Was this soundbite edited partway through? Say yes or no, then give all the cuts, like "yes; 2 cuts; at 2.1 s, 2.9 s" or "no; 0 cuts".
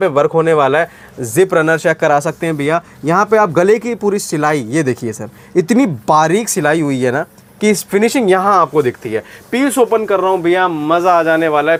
no; 0 cuts